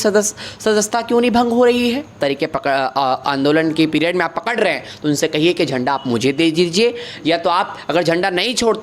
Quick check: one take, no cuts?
no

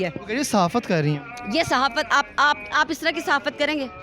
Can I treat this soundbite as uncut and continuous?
yes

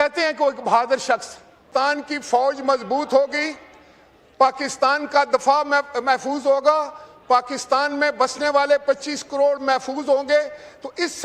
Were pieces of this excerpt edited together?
no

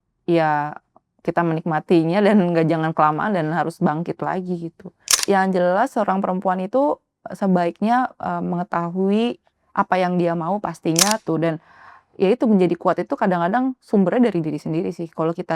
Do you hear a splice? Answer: yes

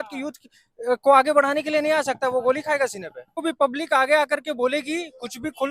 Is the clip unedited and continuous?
no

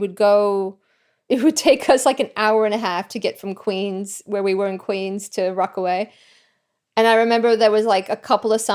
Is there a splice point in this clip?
yes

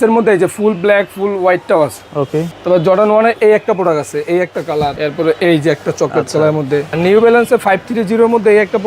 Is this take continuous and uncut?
no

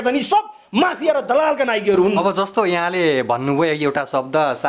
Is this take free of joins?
yes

